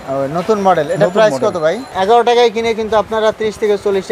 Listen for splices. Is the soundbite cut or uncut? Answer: cut